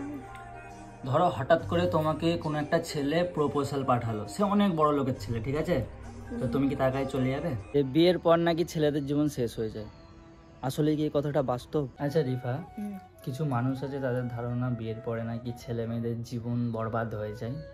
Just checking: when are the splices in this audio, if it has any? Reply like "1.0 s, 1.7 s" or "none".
7.7 s, 12.0 s

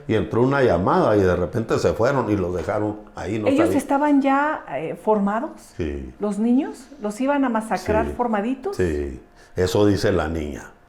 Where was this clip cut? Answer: none

